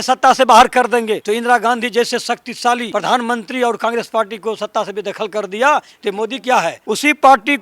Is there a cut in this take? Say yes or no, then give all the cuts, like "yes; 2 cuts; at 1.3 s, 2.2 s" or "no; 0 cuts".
yes; 3 cuts; at 1.2 s, 2.9 s, 6.8 s